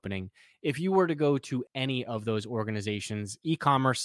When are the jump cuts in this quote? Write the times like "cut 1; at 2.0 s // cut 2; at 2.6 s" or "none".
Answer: cut 1; at 1.7 s